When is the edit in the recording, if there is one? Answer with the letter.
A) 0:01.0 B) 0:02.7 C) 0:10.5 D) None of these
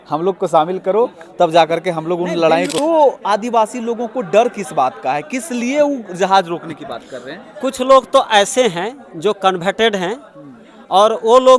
B